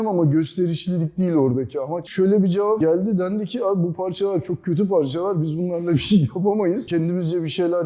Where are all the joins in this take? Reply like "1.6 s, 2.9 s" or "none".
2.1 s, 6.8 s